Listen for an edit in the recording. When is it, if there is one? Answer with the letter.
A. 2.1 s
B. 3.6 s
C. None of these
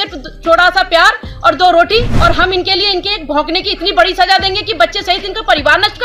A